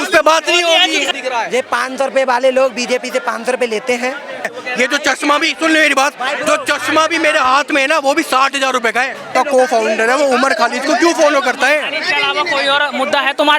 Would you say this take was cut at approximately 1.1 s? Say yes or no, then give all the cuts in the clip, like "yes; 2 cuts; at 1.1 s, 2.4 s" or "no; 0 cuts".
yes; 3 cuts; at 1.1 s, 4.5 s, 9.3 s